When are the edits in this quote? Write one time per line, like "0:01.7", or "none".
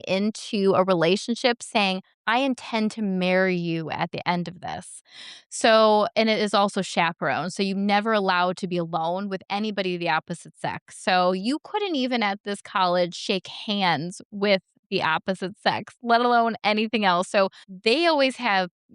0:02.1
0:17.7